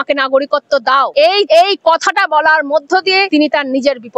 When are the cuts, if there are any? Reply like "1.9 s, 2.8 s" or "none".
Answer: 1.4 s, 3.3 s

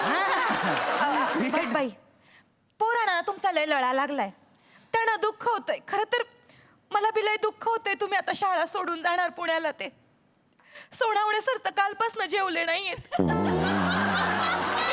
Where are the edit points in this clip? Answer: 1.5 s

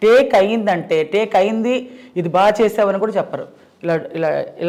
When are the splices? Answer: none

